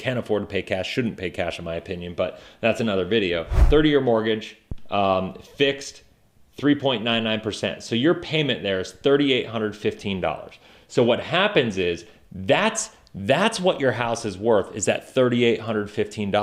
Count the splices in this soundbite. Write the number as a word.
one